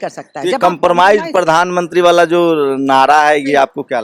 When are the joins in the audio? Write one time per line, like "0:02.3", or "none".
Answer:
none